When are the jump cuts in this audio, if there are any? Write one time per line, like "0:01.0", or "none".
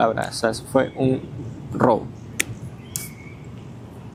none